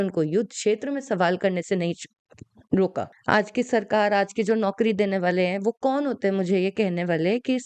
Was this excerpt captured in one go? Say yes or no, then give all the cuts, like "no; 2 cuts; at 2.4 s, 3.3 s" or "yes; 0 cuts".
no; 1 cut; at 3.2 s